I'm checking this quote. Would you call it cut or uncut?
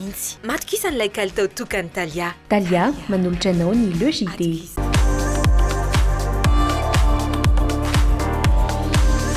uncut